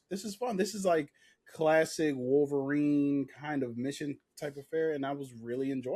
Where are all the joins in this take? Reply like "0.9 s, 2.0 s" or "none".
none